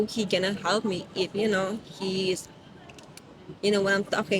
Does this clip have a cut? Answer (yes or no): no